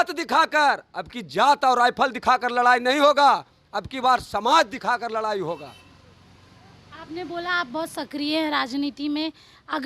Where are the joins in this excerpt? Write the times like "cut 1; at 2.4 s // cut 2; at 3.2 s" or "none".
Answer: none